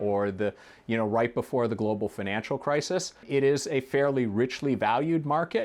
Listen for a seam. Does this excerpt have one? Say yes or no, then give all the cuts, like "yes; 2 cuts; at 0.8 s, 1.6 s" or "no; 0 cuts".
yes; 1 cut; at 3.2 s